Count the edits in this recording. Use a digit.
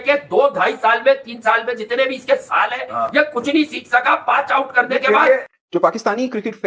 0